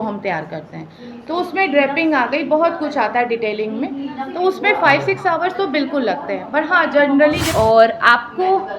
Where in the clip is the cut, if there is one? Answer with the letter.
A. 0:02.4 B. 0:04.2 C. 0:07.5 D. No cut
C